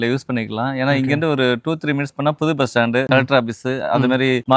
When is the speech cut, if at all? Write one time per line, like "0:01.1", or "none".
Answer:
none

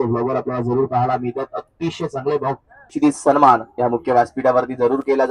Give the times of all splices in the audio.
0:02.9

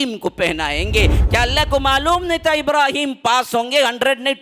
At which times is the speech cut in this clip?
0:01.2

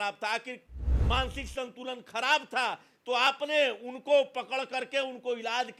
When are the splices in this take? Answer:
none

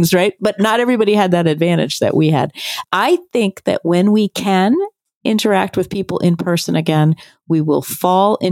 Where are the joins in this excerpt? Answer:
0:02.7

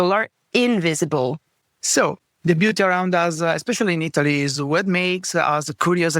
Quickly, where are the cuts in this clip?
0:02.1

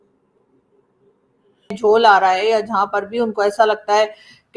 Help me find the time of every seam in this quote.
0:01.8

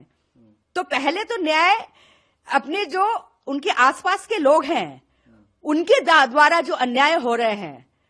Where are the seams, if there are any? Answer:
none

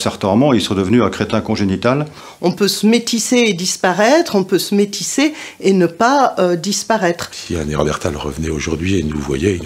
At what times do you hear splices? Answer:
0:02.2
0:07.3

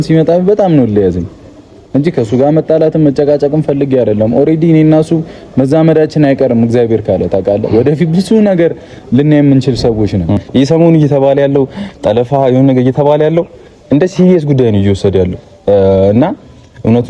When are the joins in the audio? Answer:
0:10.4

